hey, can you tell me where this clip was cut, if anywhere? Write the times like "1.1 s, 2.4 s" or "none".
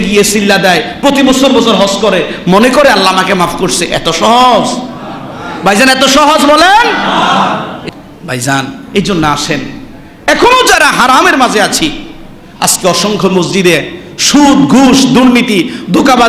7.8 s